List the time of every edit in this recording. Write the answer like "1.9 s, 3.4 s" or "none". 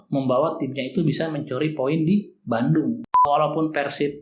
3.2 s